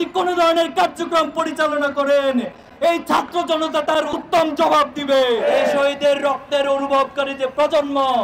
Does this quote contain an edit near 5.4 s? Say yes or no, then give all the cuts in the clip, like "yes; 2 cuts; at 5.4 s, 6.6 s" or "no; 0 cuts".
yes; 1 cut; at 5.4 s